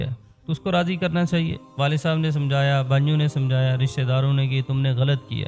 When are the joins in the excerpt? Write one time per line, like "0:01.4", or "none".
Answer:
0:01.6